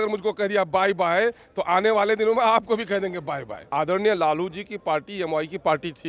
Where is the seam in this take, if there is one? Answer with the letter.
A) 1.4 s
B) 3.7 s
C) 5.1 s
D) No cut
B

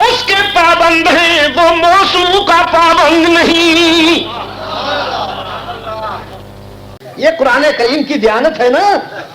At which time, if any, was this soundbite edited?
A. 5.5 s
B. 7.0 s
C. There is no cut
B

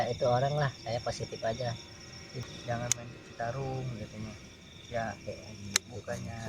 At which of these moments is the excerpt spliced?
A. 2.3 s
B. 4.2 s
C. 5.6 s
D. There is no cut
A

